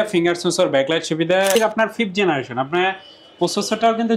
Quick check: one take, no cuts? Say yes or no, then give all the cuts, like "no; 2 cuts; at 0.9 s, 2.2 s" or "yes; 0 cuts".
no; 1 cut; at 1.6 s